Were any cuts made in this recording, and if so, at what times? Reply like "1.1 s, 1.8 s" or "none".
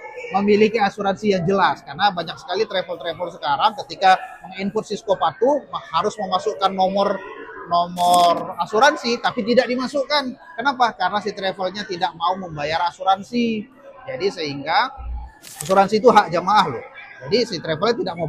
none